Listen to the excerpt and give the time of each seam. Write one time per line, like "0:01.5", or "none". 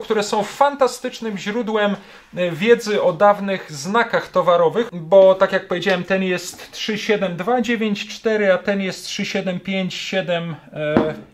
0:04.9